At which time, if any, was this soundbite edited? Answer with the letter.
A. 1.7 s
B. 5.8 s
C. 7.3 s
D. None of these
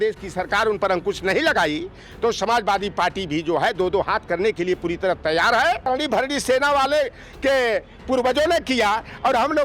B